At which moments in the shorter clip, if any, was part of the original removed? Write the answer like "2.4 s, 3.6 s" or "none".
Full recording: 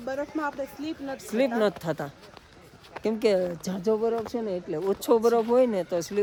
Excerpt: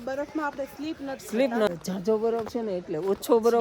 1.7 s